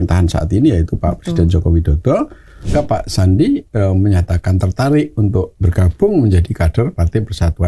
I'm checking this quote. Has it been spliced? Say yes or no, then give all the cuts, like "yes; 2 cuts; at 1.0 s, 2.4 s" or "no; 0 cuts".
yes; 1 cut; at 2.7 s